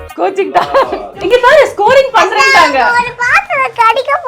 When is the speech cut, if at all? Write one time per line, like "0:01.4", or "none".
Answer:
0:01.1